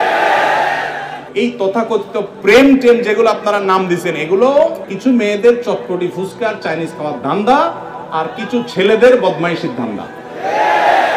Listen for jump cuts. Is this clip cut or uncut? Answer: cut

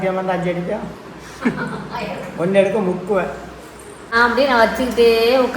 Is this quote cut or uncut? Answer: cut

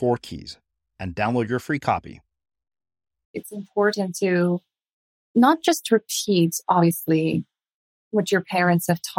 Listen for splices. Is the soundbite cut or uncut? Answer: cut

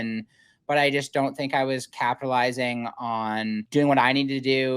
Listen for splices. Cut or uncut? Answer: cut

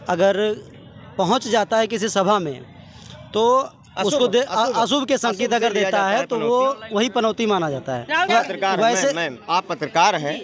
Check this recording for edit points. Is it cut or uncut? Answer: cut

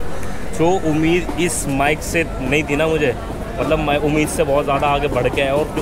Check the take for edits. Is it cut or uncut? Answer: uncut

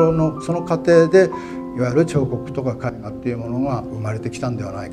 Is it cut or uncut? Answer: cut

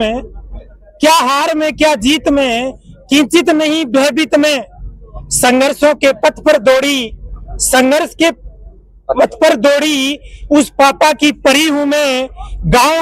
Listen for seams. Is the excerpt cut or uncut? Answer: uncut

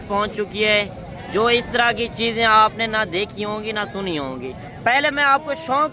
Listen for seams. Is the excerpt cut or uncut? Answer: cut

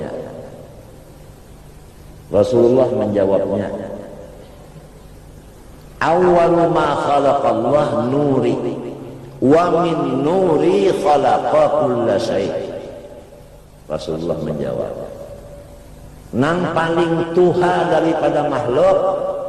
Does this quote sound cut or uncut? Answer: uncut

